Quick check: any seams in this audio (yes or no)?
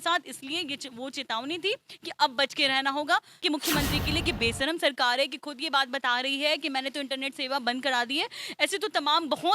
yes